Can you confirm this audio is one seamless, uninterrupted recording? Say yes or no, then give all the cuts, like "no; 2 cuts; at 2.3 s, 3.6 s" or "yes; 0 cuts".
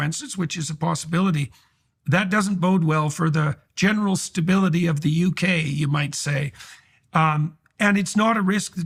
yes; 0 cuts